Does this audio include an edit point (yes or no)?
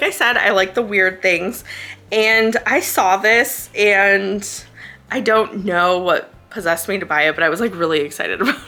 no